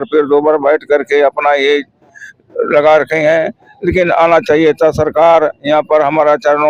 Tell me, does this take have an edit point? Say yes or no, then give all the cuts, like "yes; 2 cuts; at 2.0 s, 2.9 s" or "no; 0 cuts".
no; 0 cuts